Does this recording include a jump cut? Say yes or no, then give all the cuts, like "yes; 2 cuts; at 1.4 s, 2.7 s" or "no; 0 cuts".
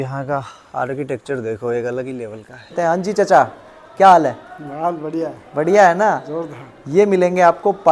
yes; 1 cut; at 2.7 s